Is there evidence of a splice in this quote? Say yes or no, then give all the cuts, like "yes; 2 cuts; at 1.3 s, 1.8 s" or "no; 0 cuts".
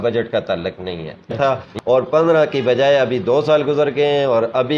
yes; 1 cut; at 1.4 s